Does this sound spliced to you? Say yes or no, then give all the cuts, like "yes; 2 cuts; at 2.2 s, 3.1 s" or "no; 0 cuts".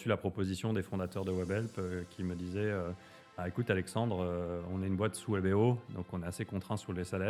no; 0 cuts